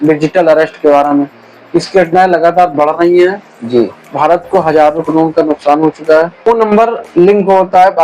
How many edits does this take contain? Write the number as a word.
one